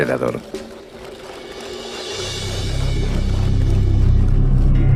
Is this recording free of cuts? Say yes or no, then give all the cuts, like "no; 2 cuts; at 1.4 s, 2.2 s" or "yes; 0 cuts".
yes; 0 cuts